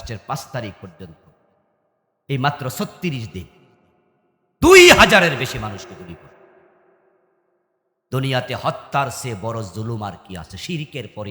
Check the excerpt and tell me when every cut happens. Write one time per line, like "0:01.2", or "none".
none